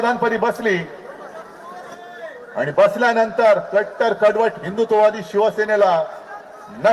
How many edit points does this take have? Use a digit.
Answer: 0